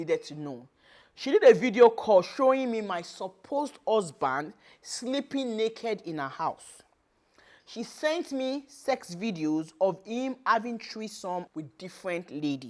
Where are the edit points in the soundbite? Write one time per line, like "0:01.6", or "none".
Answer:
0:11.5